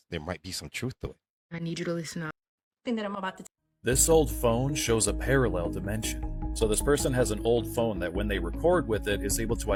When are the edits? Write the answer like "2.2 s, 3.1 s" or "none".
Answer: none